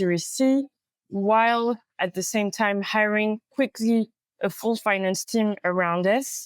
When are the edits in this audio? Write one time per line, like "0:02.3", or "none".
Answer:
none